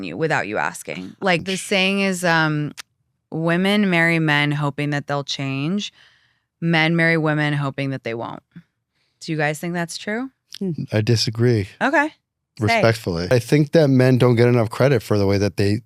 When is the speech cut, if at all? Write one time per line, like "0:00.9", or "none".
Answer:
0:01.4
0:13.3